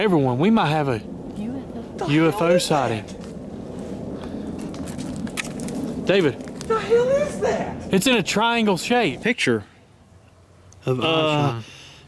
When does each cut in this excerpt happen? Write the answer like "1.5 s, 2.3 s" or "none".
9.2 s